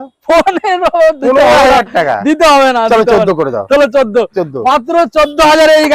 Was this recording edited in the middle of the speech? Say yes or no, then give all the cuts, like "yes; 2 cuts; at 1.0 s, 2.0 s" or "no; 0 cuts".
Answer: no; 0 cuts